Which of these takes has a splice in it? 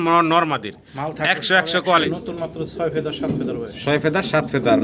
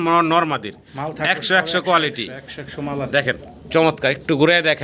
first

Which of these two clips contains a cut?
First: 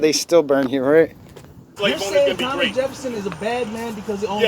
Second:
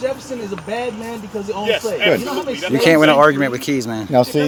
first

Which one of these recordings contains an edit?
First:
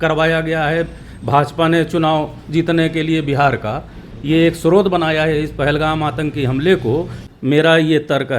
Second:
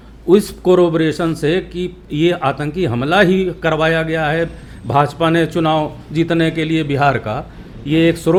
first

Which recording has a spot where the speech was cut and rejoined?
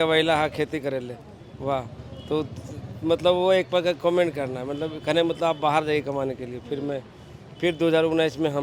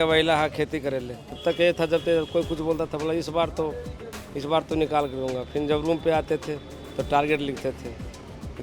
second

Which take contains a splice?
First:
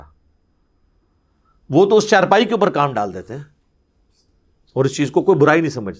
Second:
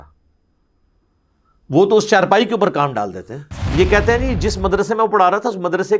second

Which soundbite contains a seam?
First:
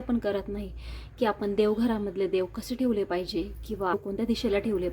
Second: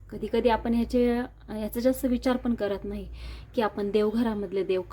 first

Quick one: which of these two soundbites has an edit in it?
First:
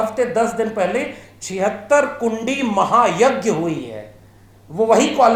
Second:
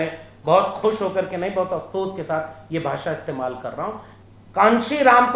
second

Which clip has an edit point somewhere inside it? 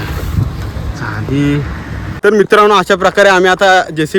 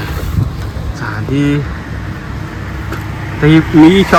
first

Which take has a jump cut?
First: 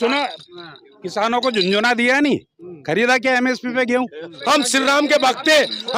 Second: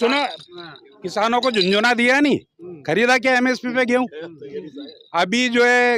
first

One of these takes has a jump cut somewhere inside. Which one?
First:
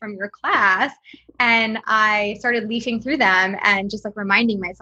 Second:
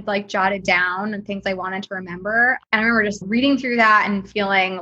second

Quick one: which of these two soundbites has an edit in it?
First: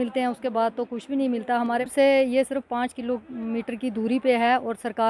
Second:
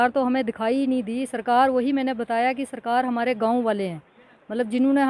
first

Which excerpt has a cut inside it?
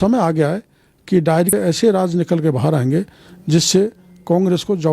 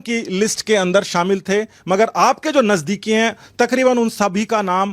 first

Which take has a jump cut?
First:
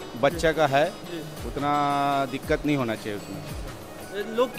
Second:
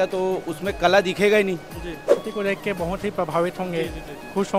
second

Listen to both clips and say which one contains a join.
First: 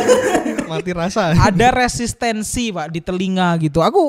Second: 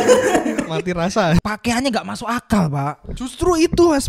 second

